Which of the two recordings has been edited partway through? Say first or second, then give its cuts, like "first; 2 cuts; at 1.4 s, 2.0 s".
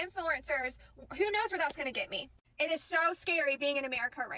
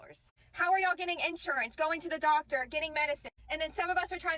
first; 1 cut; at 2.4 s